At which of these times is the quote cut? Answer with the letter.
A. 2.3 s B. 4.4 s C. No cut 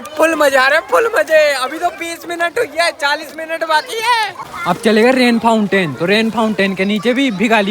B